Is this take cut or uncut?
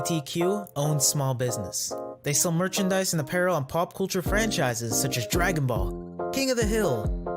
uncut